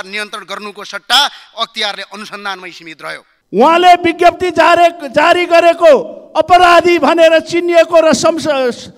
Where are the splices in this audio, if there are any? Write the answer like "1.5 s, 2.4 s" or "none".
3.3 s